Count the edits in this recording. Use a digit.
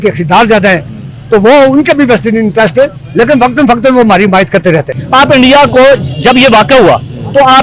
1